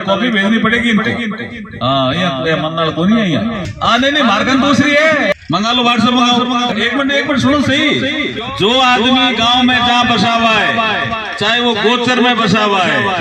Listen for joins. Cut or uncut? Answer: cut